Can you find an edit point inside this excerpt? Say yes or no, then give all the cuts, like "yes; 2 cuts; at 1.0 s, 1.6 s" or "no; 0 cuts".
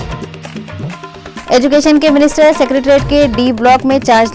no; 0 cuts